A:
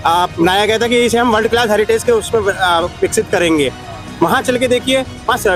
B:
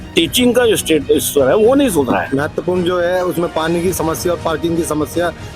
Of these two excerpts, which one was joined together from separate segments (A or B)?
B